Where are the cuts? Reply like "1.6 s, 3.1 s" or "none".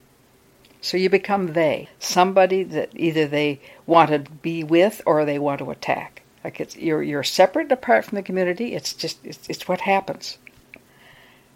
1.9 s